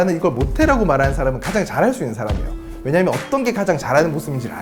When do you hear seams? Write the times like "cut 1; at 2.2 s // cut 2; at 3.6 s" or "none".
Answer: none